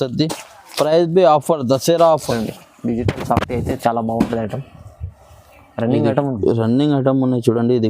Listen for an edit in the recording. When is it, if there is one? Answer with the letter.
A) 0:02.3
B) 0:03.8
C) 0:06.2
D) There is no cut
A